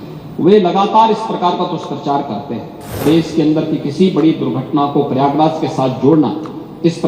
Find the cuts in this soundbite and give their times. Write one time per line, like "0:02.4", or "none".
0:03.0